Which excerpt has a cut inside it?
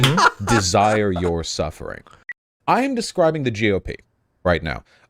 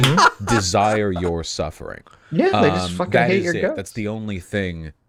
first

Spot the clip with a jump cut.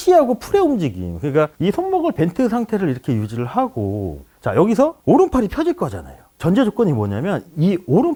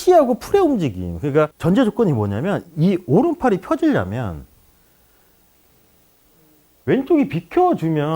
second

